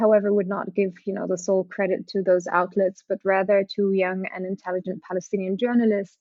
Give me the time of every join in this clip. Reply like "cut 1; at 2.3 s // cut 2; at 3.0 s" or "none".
none